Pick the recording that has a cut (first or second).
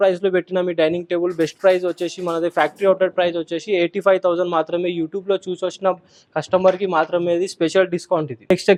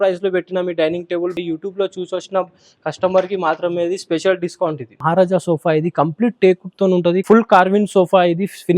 second